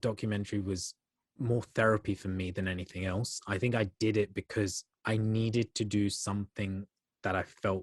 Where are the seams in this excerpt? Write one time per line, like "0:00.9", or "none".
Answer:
0:04.9